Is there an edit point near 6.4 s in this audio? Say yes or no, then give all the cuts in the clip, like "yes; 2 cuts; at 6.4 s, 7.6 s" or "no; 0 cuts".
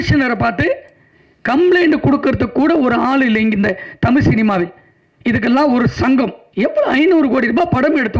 yes; 1 cut; at 6.4 s